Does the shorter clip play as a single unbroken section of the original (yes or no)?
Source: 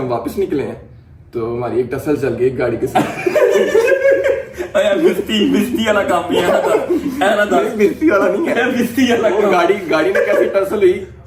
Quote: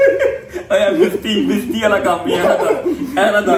yes